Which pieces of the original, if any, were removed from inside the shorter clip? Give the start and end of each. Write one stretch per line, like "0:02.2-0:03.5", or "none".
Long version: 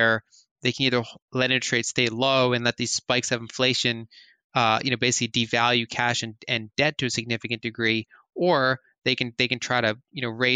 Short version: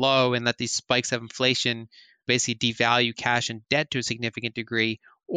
0:04.4-0:05.0
0:06.3-0:06.7